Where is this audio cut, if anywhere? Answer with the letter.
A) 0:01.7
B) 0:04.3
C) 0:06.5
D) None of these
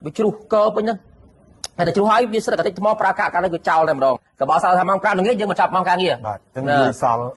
B